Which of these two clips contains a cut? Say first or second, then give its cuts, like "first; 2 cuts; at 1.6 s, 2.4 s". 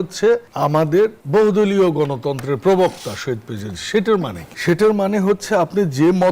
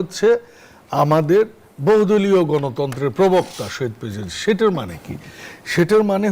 first; 2 cuts; at 0.9 s, 4.4 s